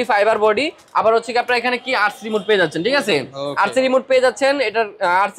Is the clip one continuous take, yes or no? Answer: yes